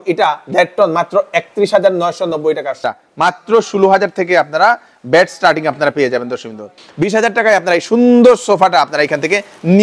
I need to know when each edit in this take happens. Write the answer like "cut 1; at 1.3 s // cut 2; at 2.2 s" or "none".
cut 1; at 2.9 s // cut 2; at 6.8 s